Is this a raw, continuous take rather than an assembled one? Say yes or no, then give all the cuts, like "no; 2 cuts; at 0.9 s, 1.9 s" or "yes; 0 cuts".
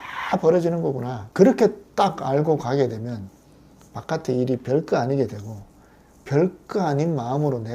no; 1 cut; at 1.2 s